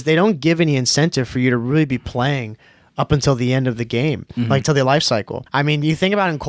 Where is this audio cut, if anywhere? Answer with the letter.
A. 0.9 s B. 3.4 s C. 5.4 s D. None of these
C